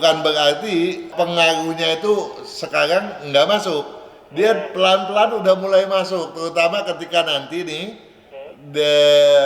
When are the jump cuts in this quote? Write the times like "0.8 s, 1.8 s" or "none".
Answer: none